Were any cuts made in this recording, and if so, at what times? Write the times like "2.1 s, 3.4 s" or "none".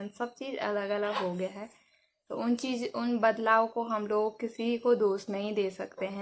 none